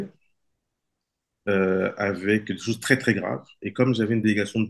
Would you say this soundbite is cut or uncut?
uncut